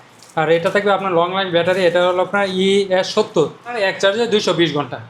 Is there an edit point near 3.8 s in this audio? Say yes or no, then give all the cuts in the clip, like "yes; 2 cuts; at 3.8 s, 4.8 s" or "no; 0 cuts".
yes; 1 cut; at 3.8 s